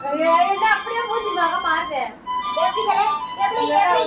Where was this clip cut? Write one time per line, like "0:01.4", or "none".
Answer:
none